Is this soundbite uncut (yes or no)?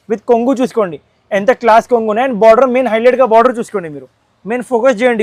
yes